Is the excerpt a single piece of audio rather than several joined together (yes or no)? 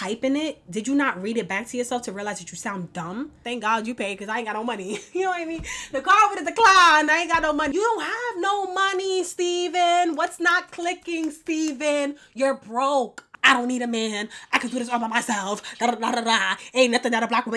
no